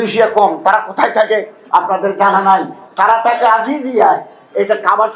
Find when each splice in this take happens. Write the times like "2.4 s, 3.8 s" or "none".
none